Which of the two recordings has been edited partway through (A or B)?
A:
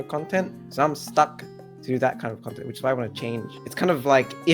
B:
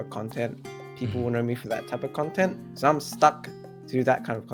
A